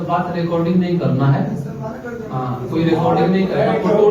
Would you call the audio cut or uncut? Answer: uncut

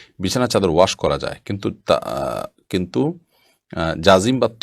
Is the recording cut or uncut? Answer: uncut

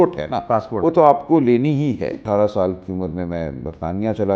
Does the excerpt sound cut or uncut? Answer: cut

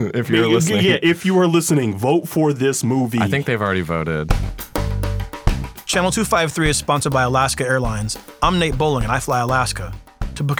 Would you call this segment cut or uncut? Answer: cut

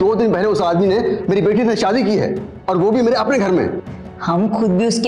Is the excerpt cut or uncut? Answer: uncut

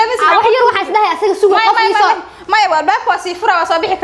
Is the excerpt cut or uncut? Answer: uncut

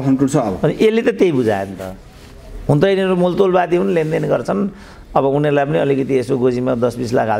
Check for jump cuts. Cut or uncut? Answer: uncut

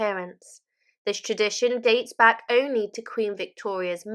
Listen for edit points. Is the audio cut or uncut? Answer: uncut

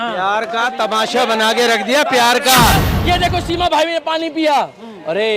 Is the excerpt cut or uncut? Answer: cut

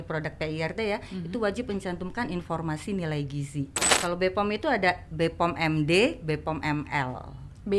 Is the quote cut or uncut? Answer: cut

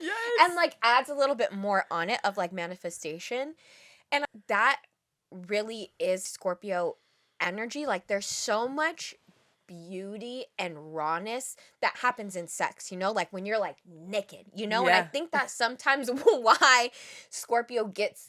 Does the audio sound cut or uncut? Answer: cut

